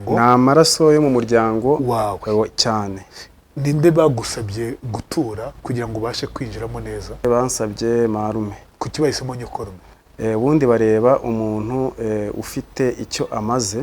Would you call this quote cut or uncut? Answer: cut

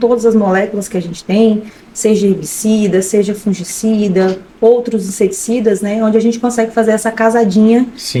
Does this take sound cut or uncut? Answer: uncut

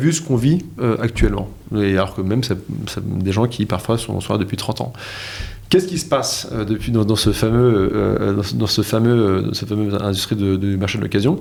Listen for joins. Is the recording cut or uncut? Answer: uncut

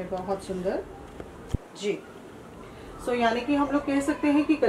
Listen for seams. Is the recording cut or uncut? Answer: uncut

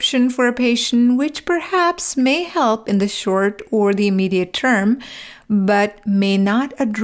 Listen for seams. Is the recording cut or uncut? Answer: uncut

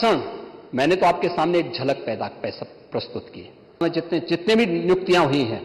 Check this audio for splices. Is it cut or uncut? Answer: cut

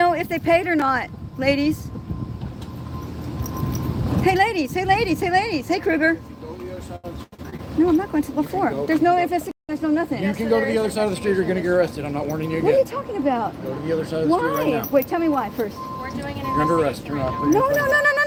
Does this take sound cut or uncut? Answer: uncut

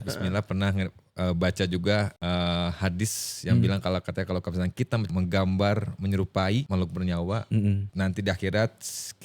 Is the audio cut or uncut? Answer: cut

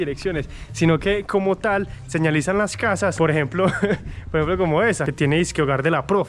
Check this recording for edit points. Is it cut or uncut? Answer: uncut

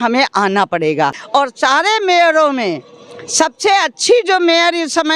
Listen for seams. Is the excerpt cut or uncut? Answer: cut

